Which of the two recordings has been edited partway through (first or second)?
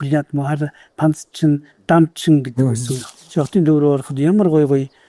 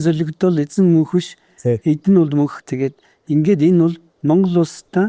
first